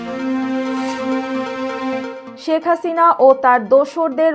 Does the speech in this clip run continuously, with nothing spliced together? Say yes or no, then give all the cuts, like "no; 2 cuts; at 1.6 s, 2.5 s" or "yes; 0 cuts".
no; 1 cut; at 2.3 s